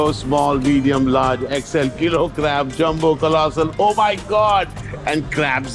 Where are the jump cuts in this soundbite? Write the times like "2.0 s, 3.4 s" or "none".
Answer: none